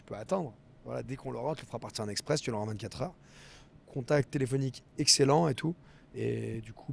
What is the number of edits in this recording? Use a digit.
0